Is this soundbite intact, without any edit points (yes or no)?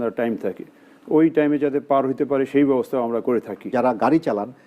no